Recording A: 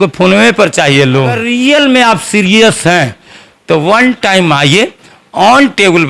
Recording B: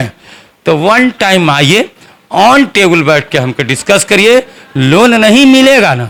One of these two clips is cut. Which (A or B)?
A